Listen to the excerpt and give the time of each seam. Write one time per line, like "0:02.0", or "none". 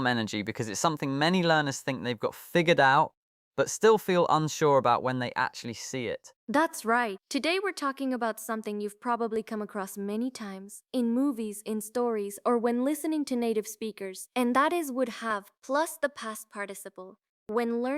0:06.2